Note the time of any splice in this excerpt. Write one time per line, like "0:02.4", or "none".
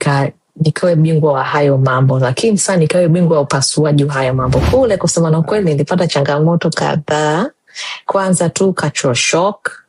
0:04.6